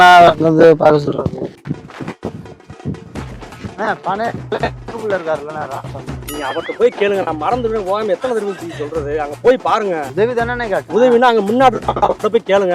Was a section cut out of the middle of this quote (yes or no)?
yes